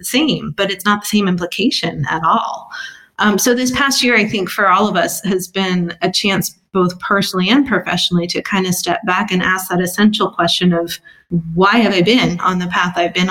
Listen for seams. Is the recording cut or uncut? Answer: uncut